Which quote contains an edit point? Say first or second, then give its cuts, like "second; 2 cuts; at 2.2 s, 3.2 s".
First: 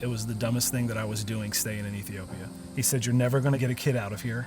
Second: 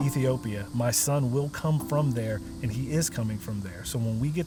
first; 1 cut; at 2.6 s